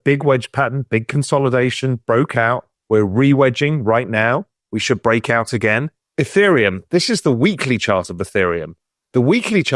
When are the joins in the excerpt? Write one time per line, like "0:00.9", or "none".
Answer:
0:06.0